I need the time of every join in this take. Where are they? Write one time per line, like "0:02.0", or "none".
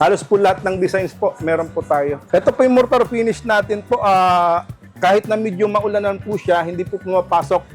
0:02.2

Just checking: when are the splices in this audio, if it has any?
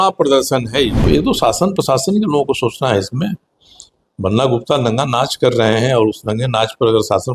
0:01.0

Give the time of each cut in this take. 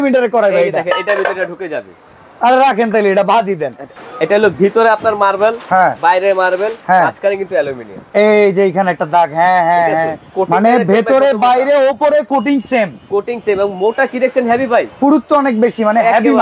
0:03.9
0:10.3
0:14.9

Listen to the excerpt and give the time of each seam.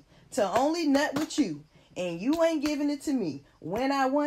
none

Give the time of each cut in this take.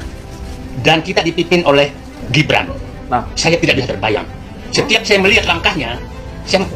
none

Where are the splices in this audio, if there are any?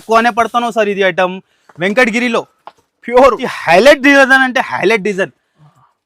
0:03.5

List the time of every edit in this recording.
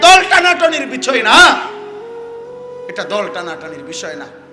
none

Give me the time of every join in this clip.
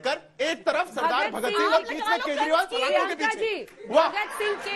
none

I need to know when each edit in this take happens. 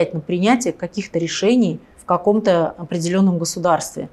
0:01.9

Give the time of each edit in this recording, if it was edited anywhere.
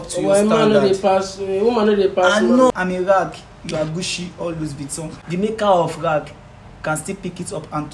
0:02.7
0:05.2

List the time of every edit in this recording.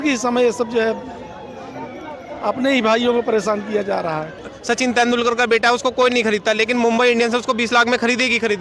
0:04.5

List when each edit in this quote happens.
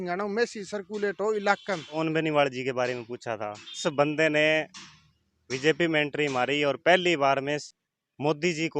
0:02.0
0:03.8
0:07.7

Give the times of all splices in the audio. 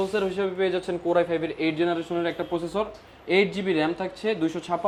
none

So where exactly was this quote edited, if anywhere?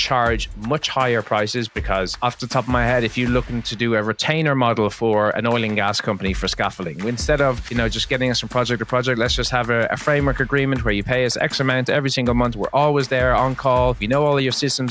none

